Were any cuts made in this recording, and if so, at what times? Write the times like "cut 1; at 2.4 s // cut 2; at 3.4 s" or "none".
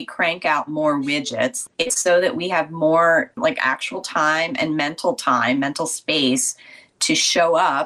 cut 1; at 1.6 s // cut 2; at 3.4 s